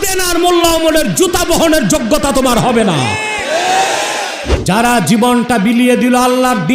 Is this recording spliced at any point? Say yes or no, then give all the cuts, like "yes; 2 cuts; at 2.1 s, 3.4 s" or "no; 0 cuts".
yes; 1 cut; at 4.5 s